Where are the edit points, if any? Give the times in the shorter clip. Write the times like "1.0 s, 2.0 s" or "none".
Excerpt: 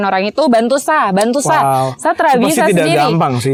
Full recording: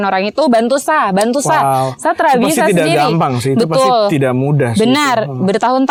none

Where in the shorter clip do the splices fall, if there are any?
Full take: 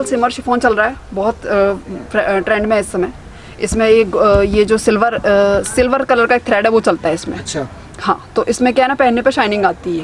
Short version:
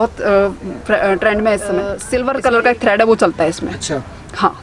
2.0 s

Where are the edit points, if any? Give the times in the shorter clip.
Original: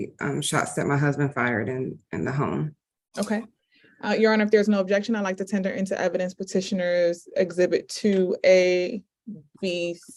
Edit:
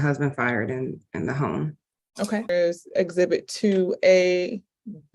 2.5 s

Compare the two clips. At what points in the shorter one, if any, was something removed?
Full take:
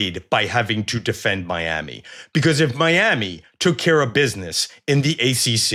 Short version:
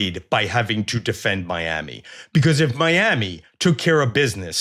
none

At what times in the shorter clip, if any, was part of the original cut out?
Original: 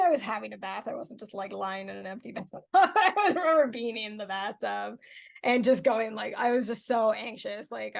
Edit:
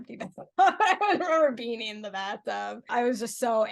2.8 s

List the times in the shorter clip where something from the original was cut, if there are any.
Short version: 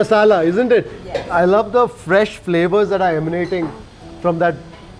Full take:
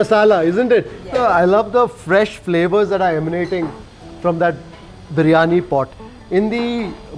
none

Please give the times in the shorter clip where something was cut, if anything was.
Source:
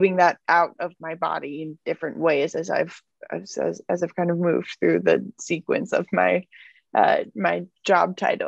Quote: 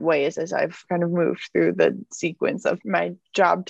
0.8 s, 2.8 s

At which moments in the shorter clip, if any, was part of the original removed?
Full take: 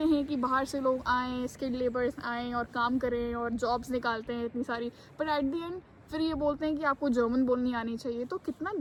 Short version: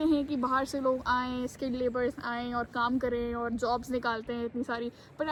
none

